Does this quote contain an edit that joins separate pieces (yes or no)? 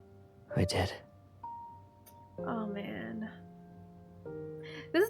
no